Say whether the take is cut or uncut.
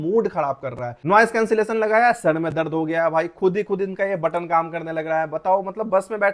uncut